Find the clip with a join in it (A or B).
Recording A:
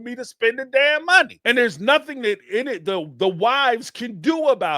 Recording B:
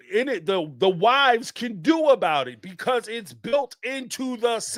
A